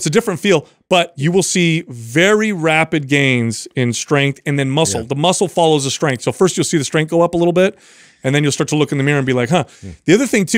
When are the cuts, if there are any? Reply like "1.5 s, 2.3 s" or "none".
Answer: 1.1 s